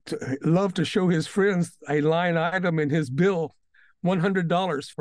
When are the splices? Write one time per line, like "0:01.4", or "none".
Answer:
none